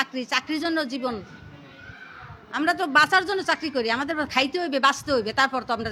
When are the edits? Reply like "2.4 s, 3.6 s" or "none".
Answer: none

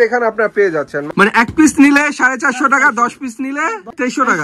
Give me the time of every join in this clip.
1.0 s, 3.5 s

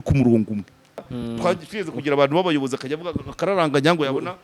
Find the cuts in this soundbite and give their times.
1.1 s

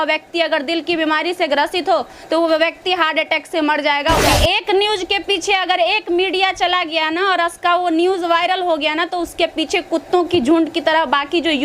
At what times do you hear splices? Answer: 4.3 s

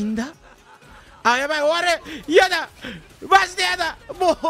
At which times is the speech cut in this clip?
none

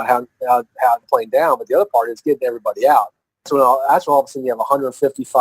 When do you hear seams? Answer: 1.0 s, 3.5 s

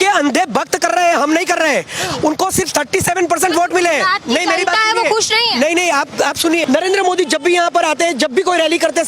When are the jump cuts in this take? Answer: 6.6 s

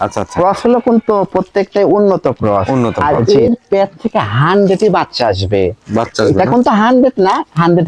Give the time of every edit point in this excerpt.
3.0 s

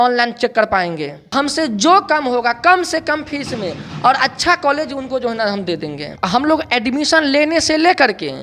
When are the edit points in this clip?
1.2 s, 6.1 s

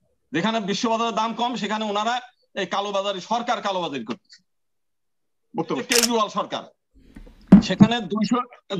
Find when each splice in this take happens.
5.8 s

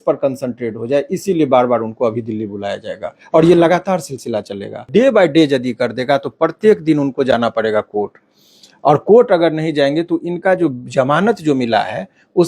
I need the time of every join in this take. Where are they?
4.9 s

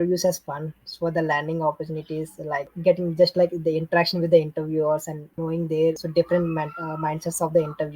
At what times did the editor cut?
2.8 s, 5.2 s, 6.0 s

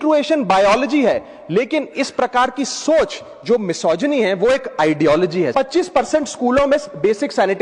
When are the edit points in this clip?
5.5 s

